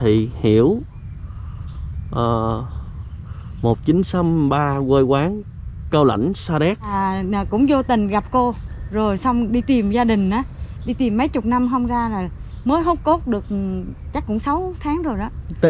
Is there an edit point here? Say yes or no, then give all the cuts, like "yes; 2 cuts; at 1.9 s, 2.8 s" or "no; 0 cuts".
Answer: yes; 1 cut; at 6.9 s